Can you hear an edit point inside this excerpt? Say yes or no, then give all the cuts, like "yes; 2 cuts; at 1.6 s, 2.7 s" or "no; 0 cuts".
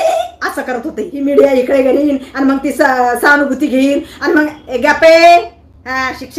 yes; 1 cut; at 1.2 s